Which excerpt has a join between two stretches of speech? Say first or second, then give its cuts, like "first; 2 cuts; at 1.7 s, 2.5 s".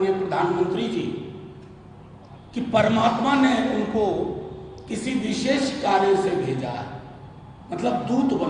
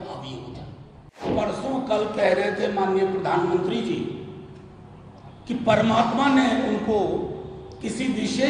second; 1 cut; at 1.3 s